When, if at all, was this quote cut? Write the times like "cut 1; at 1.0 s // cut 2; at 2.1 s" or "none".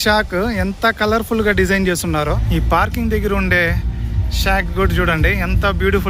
cut 1; at 2.4 s